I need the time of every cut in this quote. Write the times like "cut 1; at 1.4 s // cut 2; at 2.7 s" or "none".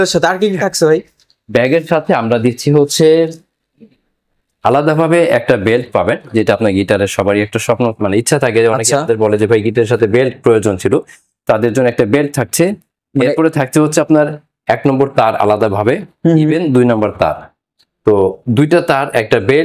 none